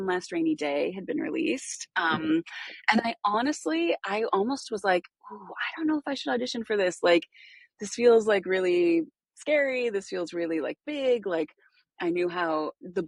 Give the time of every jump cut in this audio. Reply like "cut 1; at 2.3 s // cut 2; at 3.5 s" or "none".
none